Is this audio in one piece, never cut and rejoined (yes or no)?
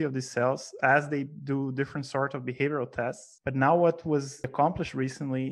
no